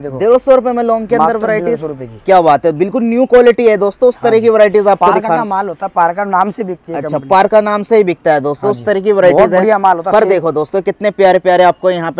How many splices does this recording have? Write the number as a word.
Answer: zero